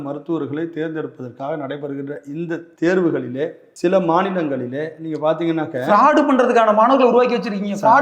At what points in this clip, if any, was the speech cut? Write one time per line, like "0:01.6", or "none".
0:02.7
0:03.6

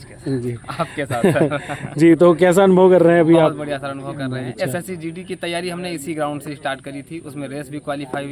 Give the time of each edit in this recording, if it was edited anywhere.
none

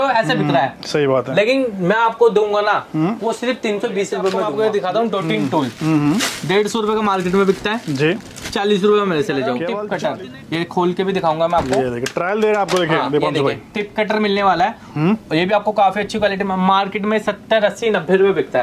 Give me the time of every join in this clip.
0:04.4
0:09.7

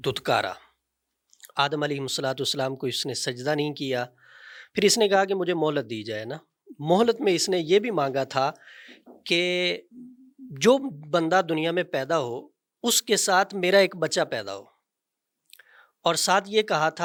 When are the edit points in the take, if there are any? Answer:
none

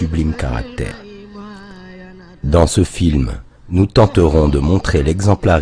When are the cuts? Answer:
0:00.9

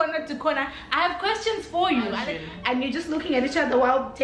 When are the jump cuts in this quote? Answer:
0:02.2

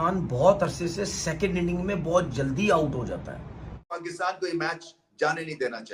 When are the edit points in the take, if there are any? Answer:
0:04.0

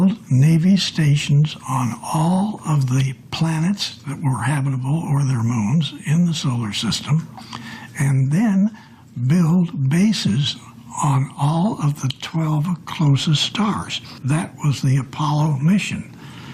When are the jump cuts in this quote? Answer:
0:14.5

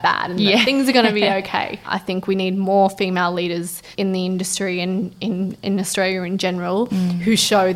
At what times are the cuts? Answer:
0:01.8
0:03.9

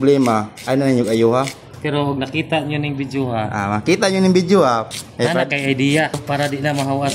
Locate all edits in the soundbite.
0:01.7
0:04.9
0:06.2

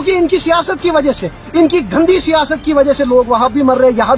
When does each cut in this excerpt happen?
none

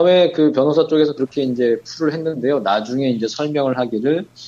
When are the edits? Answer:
0:01.9

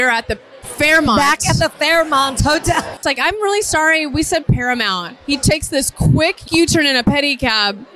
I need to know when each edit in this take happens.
0:03.0
0:06.5

